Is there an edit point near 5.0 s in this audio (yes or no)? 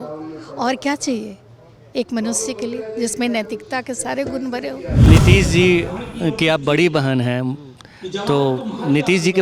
yes